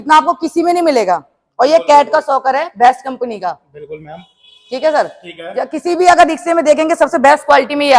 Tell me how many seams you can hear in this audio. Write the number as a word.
zero